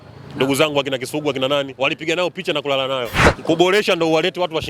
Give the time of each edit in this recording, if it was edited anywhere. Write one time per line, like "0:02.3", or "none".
0:03.2